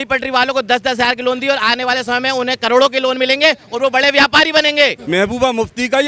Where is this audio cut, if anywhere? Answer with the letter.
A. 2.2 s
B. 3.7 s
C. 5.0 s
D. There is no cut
C